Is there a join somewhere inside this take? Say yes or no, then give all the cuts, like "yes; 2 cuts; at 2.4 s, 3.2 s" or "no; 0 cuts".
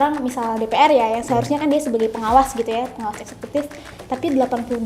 no; 0 cuts